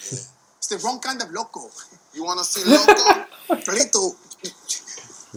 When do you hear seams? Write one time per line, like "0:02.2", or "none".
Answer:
none